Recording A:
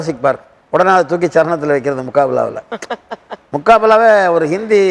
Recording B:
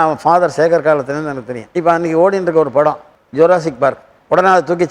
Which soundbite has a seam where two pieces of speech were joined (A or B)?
B